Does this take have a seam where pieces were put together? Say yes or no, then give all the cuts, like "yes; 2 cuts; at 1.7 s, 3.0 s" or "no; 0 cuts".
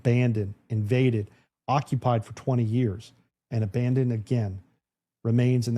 no; 0 cuts